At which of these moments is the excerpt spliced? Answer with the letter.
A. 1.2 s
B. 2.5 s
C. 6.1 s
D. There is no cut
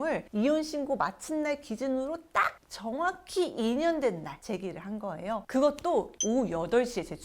C